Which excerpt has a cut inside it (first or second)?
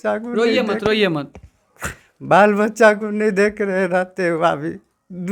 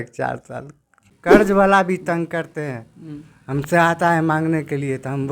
second